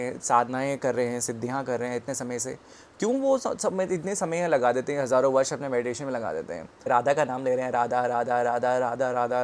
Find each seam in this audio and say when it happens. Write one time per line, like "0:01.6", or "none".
0:06.8